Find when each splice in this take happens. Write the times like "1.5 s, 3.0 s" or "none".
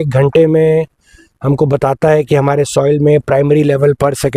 none

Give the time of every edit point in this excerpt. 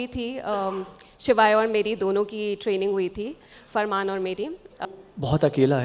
4.8 s

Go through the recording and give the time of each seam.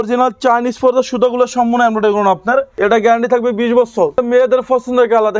2.7 s, 4.2 s

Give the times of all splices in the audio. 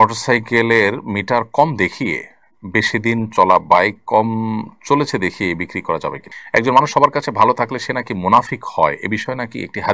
6.3 s

